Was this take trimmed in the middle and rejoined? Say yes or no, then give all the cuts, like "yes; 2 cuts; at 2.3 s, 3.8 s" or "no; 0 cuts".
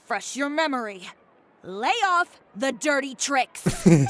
no; 0 cuts